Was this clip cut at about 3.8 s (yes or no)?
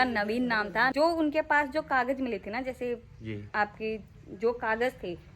no